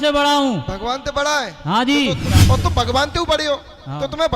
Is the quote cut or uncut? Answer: cut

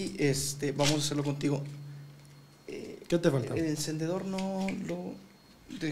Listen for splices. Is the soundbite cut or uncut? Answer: uncut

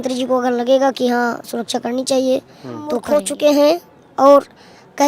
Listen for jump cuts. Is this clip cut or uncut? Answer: cut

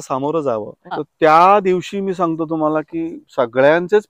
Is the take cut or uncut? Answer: cut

